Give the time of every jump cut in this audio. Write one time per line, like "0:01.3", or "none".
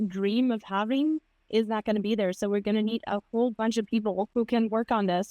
0:04.3